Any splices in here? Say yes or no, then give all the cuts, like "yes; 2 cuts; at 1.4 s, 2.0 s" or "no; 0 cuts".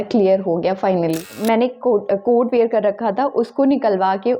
yes; 1 cut; at 1.3 s